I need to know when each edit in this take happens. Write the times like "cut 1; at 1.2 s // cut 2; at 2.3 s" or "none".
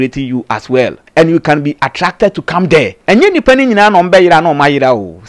cut 1; at 1.0 s // cut 2; at 3.0 s